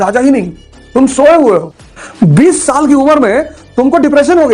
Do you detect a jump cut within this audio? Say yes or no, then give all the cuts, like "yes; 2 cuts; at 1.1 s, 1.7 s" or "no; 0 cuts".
yes; 2 cuts; at 1.0 s, 1.8 s